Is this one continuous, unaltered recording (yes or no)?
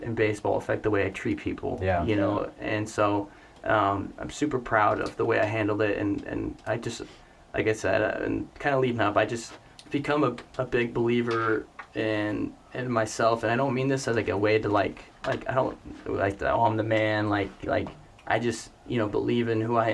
yes